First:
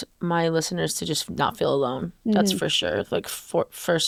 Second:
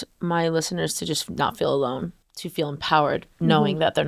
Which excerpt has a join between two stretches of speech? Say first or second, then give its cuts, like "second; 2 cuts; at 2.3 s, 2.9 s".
second; 1 cut; at 2.1 s